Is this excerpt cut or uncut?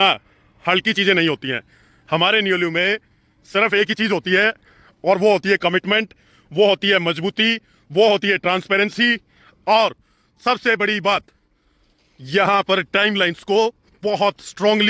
uncut